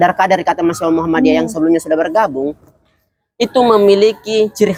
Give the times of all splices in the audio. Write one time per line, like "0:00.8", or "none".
none